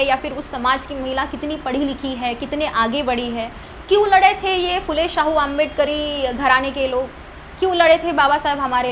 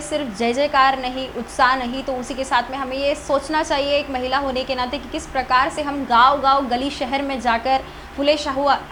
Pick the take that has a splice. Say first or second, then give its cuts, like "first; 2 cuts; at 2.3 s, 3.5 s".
first; 1 cut; at 3.7 s